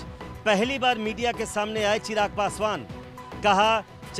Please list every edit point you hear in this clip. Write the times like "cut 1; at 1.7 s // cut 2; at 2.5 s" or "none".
none